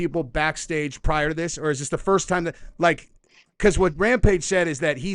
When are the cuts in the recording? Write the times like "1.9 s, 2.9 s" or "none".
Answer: none